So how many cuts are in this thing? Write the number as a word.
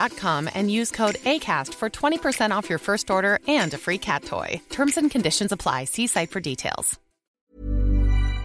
one